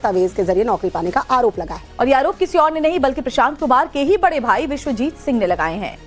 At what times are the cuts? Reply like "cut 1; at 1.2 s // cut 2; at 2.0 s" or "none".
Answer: none

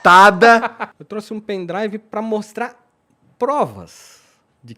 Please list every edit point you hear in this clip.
cut 1; at 0.9 s

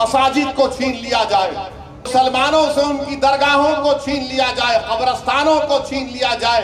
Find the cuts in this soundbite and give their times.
cut 1; at 2.1 s

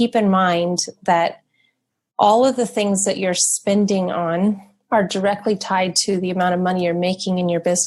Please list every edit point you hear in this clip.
cut 1; at 4.7 s

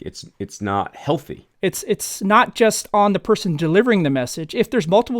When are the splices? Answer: cut 1; at 1.4 s

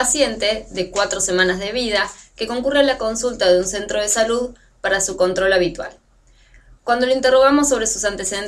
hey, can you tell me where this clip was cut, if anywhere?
cut 1; at 3.8 s

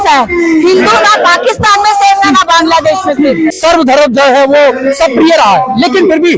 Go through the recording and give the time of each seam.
cut 1; at 3.6 s

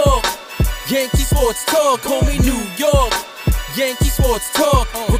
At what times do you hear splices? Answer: none

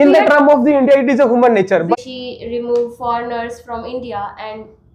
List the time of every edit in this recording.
cut 1; at 1.9 s

